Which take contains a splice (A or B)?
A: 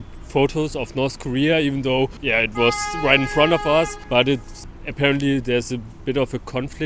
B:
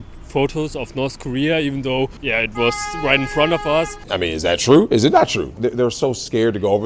B